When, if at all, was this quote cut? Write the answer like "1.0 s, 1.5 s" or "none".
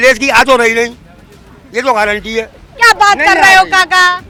none